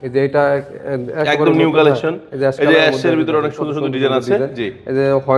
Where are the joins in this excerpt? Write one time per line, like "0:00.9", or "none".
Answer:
none